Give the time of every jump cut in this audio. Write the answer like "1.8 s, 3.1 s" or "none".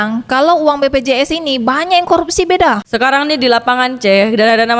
none

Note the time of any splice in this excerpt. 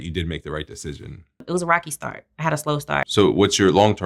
1.4 s, 3.1 s

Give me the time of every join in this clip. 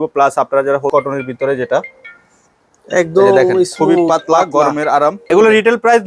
0.9 s, 5.2 s

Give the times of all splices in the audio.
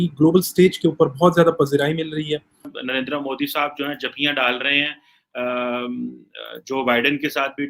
2.7 s

